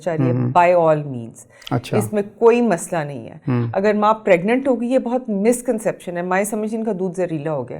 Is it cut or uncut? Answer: uncut